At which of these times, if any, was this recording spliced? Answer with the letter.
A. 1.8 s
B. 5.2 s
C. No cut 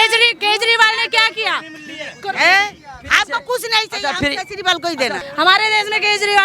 B